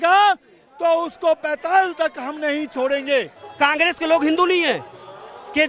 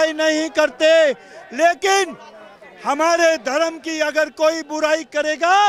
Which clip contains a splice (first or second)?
first